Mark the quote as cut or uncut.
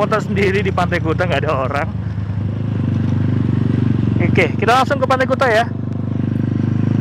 uncut